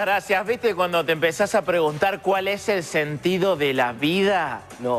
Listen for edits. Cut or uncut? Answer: uncut